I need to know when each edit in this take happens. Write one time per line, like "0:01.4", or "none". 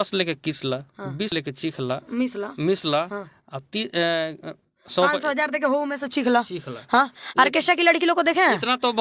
0:01.3